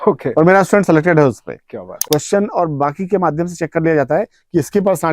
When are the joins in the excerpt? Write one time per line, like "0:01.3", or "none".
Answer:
0:01.9